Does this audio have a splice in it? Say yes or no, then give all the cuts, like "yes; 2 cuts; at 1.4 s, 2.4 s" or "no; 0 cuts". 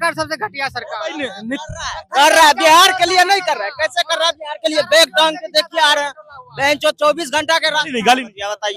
no; 0 cuts